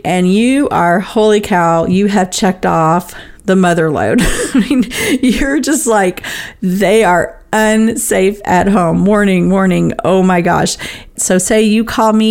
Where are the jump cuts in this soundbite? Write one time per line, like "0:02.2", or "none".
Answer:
0:11.1